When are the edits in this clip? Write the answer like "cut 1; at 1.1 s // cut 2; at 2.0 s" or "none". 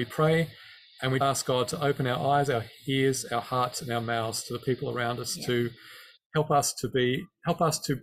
cut 1; at 1.2 s